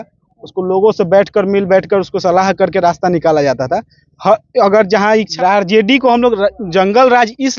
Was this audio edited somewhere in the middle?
yes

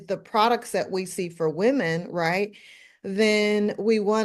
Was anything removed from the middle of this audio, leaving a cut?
no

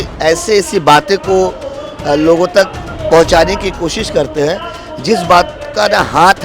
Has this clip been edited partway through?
no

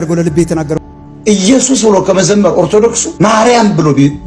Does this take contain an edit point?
yes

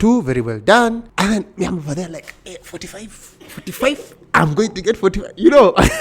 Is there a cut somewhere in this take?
no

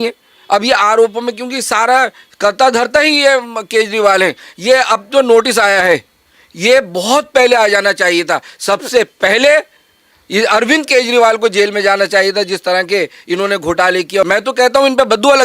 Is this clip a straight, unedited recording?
no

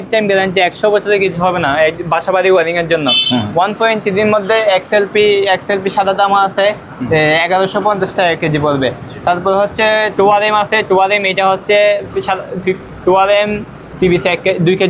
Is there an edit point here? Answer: no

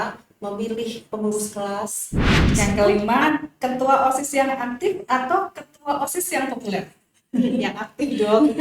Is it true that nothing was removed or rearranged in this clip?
no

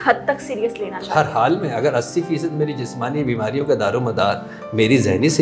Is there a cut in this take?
no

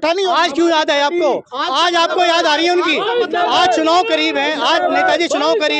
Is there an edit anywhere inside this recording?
no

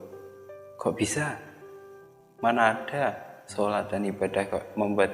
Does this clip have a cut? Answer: no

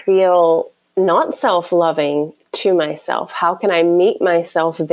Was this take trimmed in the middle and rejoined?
no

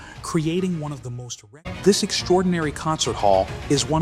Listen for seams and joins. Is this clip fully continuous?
no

